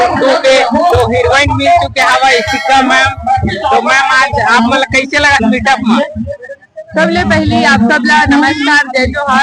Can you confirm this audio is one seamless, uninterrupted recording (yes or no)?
yes